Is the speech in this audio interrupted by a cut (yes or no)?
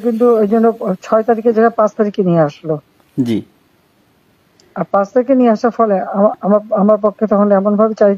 no